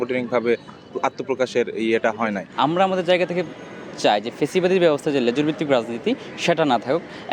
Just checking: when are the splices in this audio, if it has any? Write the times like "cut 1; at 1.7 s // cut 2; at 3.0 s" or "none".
cut 1; at 2.4 s